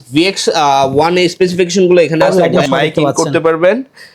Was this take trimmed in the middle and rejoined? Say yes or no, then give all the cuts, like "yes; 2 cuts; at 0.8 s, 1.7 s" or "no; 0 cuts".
yes; 1 cut; at 2.2 s